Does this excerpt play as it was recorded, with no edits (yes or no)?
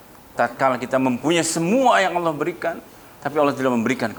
yes